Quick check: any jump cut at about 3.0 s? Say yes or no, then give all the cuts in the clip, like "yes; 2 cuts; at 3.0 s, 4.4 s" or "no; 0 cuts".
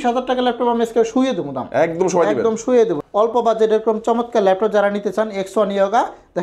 yes; 1 cut; at 3.0 s